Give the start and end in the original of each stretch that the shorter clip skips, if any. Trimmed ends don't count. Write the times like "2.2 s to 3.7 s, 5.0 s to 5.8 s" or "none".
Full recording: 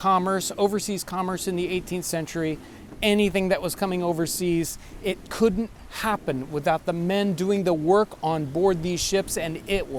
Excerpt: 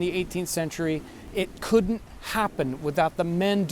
2.7 s to 4.8 s

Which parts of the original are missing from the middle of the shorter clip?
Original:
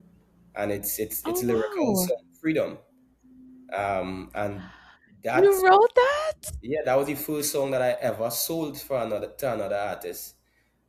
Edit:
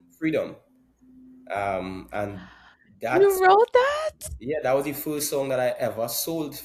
none

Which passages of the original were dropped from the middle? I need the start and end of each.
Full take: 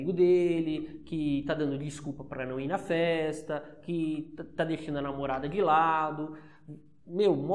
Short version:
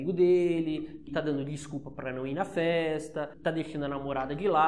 1.1 s to 1.4 s, 3.7 s to 4.5 s

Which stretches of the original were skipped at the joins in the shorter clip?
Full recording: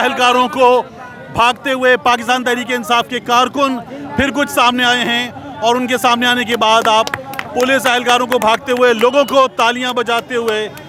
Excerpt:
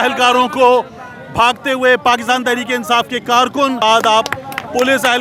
3.8 s to 6.6 s

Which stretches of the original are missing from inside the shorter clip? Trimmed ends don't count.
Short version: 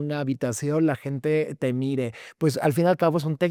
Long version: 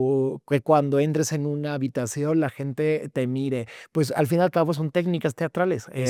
none

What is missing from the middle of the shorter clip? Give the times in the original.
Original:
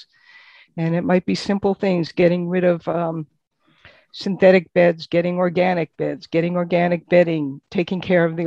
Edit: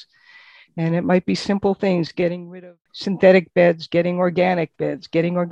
2.4 s to 3.6 s

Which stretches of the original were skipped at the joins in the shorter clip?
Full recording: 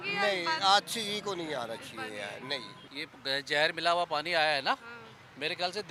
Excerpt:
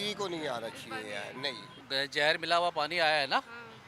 2.8 s to 3.1 s

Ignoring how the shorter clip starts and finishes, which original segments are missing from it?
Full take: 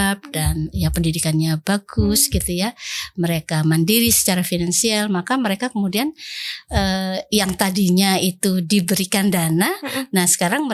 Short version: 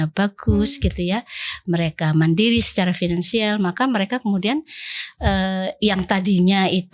none

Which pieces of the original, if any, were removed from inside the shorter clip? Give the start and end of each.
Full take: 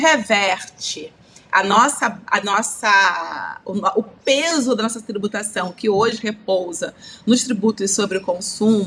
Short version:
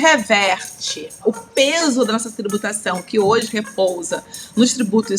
1.2 s to 3.9 s

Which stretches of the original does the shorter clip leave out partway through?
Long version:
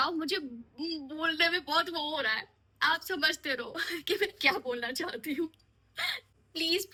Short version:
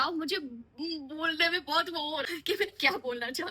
2.3 s to 3.9 s

